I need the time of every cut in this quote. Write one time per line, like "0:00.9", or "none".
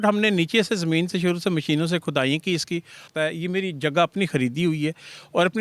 0:03.1